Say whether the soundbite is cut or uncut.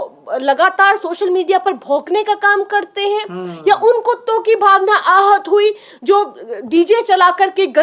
uncut